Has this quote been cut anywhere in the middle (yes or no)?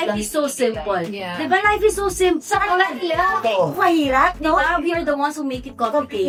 no